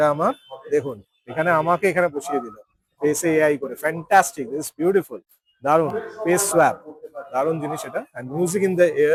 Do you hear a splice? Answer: no; 0 cuts

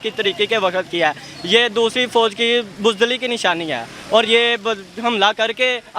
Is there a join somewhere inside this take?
no; 0 cuts

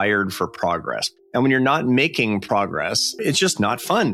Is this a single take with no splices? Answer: no; 2 cuts; at 1.0 s, 3.2 s

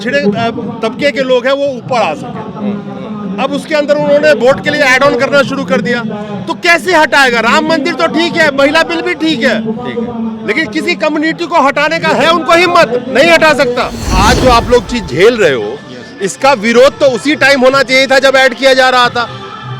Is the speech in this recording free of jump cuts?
no; 1 cut; at 14.1 s

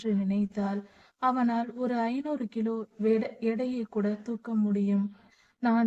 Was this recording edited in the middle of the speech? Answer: no; 0 cuts

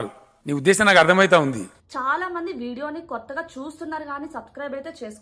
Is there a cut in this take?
yes; 1 cut; at 1.8 s

